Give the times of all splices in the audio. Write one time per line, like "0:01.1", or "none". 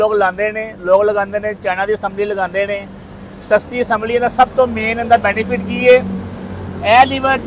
none